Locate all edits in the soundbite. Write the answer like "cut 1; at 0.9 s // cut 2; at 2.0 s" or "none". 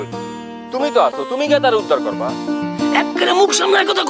cut 1; at 2.0 s // cut 2; at 3.2 s